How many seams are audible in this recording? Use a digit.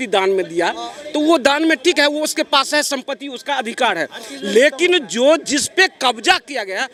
0